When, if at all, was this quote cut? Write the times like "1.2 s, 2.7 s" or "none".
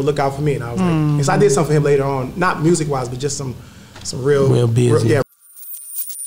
5.2 s